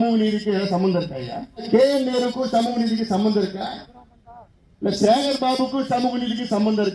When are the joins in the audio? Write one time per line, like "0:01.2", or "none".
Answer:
0:01.7